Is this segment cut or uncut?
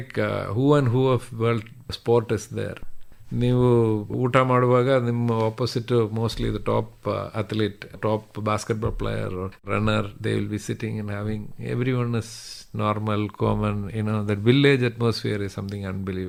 uncut